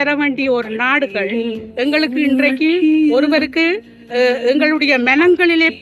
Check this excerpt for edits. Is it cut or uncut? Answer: uncut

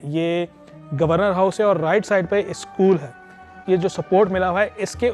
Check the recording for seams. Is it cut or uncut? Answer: cut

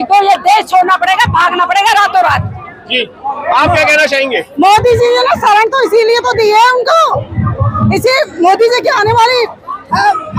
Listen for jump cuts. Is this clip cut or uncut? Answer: uncut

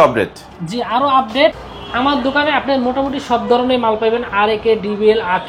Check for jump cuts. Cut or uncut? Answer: cut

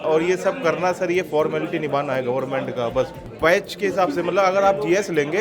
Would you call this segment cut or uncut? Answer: cut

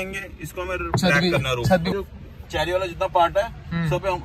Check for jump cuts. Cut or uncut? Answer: cut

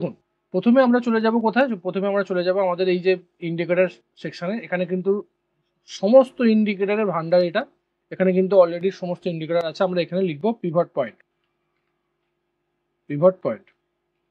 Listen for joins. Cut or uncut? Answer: uncut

